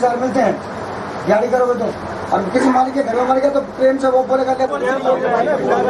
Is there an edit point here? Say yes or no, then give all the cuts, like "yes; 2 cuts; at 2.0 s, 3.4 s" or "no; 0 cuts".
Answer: no; 0 cuts